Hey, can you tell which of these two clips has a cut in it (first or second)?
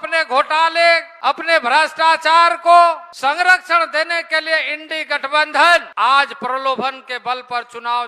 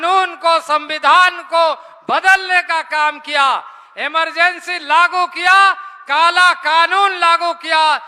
first